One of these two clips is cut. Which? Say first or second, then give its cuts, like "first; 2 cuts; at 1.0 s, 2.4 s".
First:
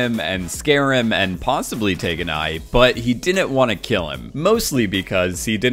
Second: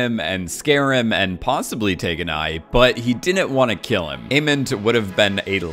second; 1 cut; at 4.2 s